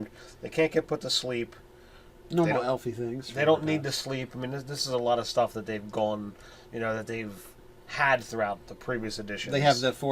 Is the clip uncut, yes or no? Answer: no